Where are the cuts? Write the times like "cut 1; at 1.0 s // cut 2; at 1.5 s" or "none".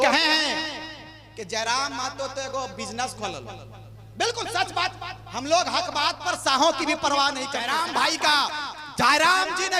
cut 1; at 7.6 s